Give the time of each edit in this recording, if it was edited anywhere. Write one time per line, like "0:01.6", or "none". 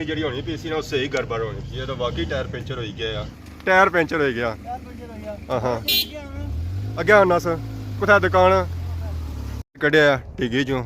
0:03.6
0:09.6